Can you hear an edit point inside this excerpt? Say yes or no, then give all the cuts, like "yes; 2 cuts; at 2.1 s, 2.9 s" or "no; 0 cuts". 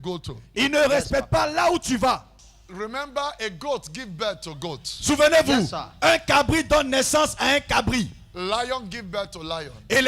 yes; 1 cut; at 2.4 s